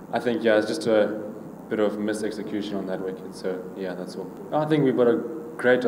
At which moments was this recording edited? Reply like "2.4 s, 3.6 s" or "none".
4.4 s